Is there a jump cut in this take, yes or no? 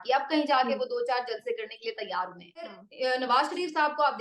yes